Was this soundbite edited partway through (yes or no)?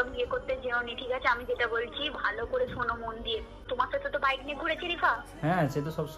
yes